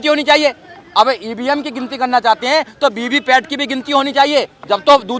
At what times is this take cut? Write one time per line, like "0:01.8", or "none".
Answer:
none